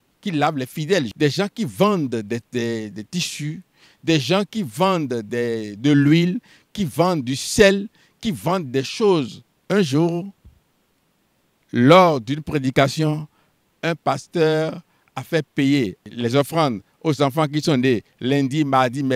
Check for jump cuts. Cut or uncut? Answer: uncut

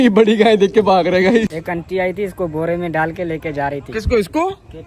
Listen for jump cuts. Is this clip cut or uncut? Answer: cut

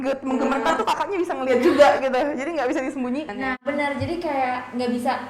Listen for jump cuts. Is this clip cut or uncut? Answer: cut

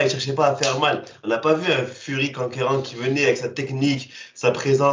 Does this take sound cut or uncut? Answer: uncut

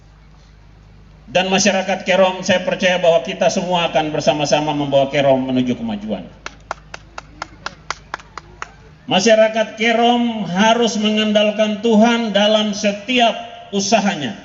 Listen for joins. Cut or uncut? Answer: cut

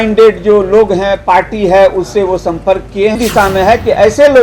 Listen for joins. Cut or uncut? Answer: cut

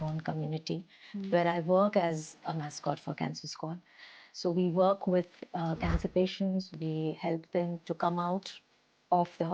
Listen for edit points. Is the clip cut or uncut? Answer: uncut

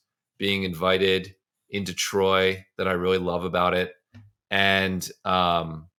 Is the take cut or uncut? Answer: uncut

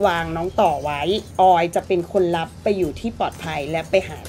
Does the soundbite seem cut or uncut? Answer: uncut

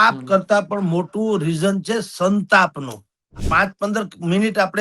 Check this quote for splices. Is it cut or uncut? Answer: cut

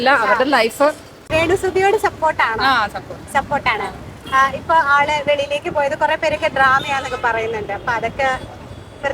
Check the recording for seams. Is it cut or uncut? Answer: cut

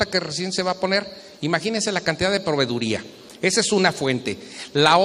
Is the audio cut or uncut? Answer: uncut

